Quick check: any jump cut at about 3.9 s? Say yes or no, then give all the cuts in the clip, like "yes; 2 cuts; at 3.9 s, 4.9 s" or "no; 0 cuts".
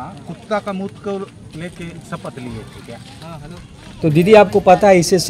yes; 1 cut; at 3.9 s